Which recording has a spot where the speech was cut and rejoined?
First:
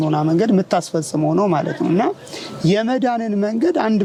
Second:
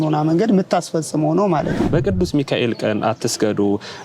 second; 1 cut; at 1.9 s

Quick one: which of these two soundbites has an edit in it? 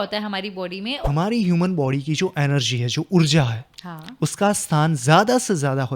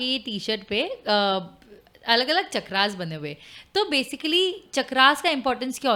first; 1 cut; at 1.0 s

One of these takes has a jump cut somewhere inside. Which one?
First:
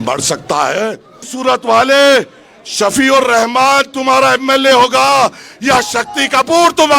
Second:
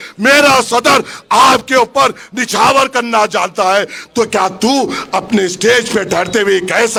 first; 1 cut; at 1.2 s

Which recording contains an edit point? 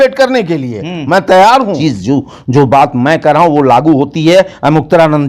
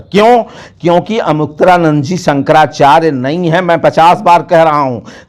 first; 1 cut; at 1.8 s

